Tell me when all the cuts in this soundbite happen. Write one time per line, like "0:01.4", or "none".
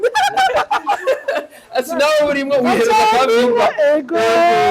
none